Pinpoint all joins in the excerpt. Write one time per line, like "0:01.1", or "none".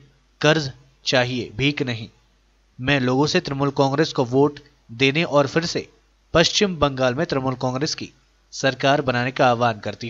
none